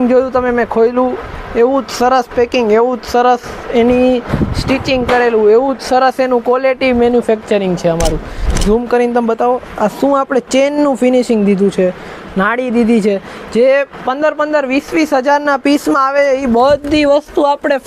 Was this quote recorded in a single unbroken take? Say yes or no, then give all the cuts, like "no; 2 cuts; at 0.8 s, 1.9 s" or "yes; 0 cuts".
no; 1 cut; at 8.5 s